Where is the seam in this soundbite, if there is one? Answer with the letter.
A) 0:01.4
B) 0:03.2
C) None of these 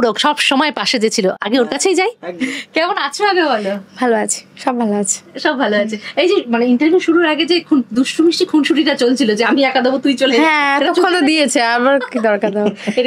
C